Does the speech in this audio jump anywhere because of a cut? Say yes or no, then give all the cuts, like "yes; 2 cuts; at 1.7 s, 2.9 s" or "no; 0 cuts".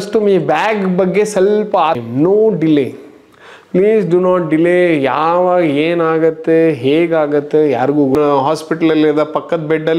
yes; 2 cuts; at 2.0 s, 8.2 s